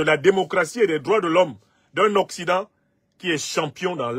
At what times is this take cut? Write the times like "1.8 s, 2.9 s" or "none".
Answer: none